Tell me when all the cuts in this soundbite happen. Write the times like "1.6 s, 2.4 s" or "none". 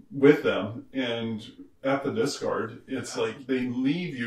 3.4 s